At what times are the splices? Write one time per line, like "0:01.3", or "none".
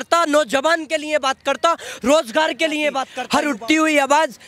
0:03.1